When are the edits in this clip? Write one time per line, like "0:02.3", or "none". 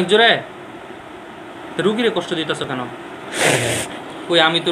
none